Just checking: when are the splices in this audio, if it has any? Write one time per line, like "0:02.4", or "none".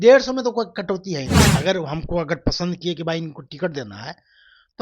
0:01.4